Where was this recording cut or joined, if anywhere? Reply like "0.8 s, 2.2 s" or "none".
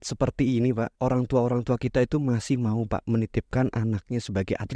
0.9 s

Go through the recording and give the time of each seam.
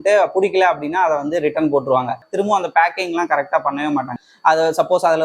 2.3 s, 4.1 s

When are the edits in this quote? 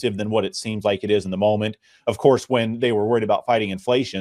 none

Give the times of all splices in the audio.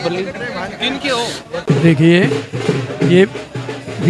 1.5 s

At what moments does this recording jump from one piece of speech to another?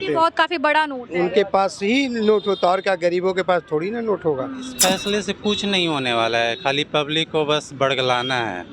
4.7 s

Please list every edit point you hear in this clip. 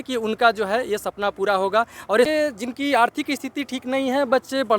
2.3 s

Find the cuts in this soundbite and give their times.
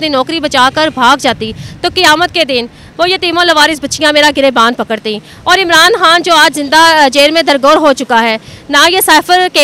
none

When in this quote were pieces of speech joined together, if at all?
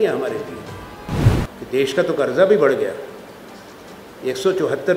1.3 s

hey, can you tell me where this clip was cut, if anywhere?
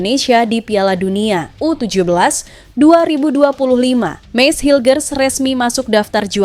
4.2 s

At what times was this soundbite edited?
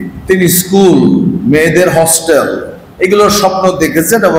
none

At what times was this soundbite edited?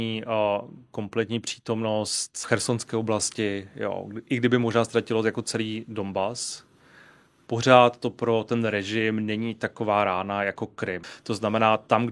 2.3 s, 11.1 s

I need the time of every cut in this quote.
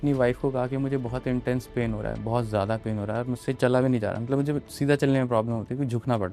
none

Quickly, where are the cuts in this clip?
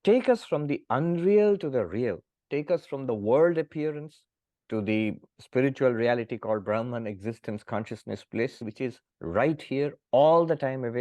2.3 s, 8.7 s

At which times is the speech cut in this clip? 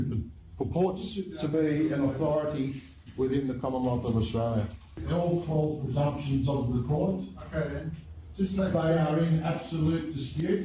5.0 s

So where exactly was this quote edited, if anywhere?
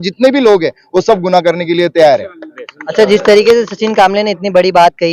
none

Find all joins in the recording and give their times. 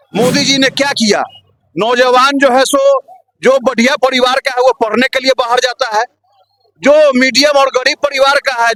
none

